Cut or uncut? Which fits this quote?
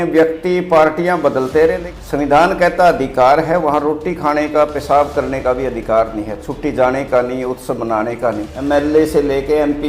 cut